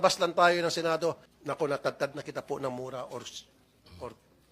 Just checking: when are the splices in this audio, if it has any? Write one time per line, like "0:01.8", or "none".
0:01.3